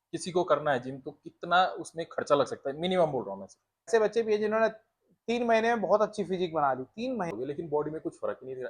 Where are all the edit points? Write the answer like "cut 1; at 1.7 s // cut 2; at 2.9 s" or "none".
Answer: cut 1; at 3.9 s // cut 2; at 7.3 s